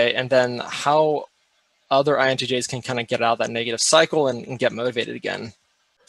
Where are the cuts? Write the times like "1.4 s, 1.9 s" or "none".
none